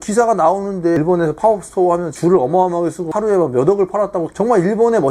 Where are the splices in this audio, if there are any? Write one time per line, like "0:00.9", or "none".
0:01.0